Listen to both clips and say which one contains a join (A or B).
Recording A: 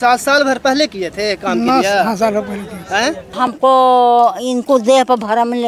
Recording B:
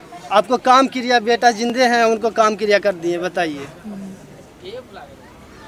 A